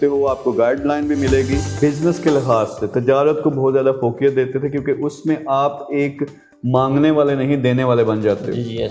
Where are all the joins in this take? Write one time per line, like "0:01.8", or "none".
0:01.7